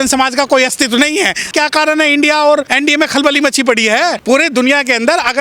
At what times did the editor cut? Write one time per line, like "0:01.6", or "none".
0:01.4
0:02.7
0:04.2